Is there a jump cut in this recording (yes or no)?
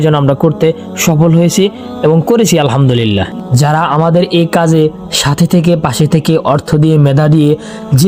yes